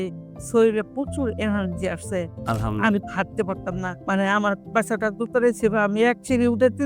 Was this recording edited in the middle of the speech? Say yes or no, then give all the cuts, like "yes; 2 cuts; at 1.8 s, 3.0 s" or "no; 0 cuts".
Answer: yes; 1 cut; at 3.9 s